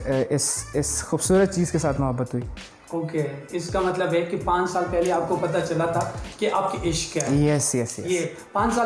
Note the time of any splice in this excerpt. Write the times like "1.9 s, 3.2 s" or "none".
none